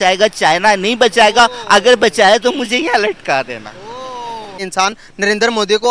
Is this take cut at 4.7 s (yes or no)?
yes